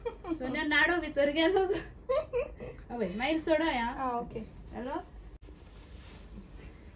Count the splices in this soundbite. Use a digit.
1